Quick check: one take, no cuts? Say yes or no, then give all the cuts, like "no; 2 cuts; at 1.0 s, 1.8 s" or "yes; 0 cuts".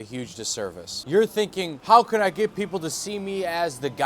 no; 1 cut; at 0.9 s